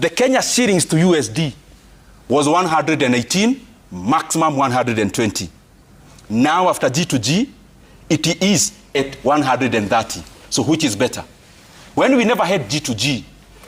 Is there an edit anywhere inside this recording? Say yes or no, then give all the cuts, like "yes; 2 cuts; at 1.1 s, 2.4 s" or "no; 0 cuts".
no; 0 cuts